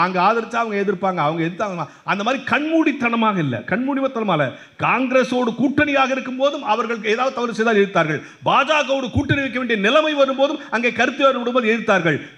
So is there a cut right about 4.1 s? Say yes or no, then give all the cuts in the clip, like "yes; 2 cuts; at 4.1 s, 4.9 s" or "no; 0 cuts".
no; 0 cuts